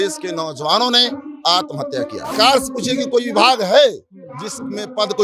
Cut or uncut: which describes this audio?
cut